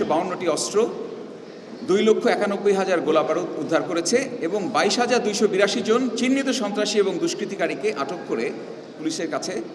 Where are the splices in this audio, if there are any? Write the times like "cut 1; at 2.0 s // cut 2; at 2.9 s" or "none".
none